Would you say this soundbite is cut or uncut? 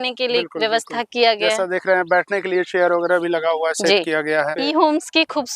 cut